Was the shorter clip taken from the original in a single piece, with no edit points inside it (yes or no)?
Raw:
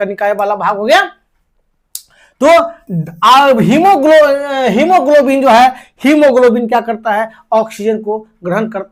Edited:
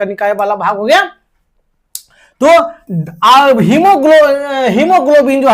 yes